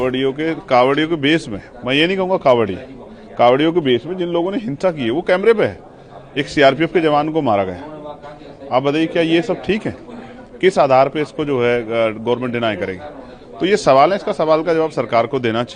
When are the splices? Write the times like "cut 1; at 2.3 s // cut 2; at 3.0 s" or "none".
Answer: none